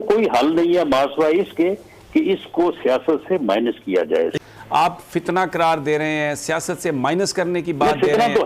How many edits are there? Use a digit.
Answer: 1